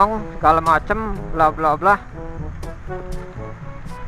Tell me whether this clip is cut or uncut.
uncut